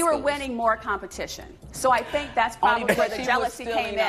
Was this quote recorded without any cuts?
yes; 0 cuts

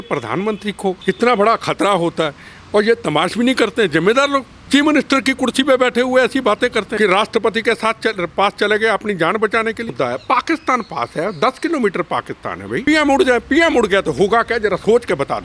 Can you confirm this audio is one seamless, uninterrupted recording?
no; 5 cuts; at 1.0 s, 4.5 s, 6.9 s, 9.9 s, 12.9 s

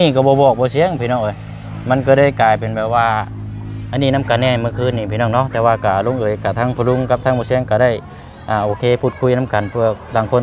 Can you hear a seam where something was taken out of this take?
no; 0 cuts

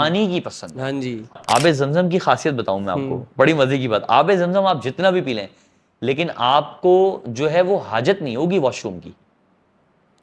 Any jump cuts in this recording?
yes; 1 cut; at 1.4 s

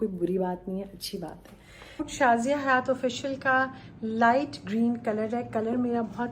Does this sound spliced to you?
yes; 1 cut; at 2.1 s

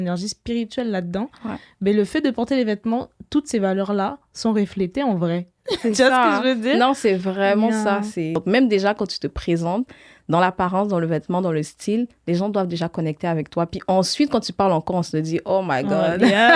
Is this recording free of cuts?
no; 1 cut; at 8.4 s

